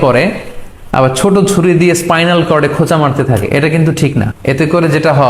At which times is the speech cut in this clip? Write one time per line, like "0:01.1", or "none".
0:04.3